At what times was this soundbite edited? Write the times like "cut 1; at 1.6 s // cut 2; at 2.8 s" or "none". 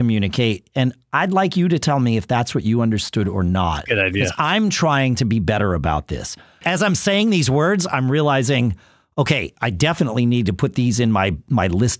cut 1; at 6.6 s